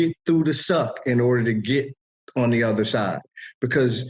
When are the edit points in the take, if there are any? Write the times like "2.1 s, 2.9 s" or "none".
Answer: none